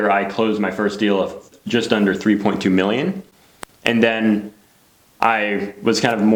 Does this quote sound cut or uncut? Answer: uncut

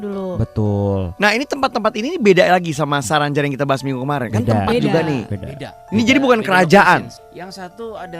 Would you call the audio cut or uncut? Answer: cut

